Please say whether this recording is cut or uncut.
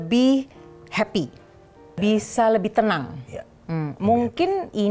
cut